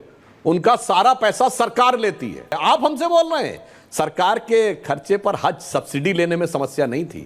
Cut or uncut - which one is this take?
cut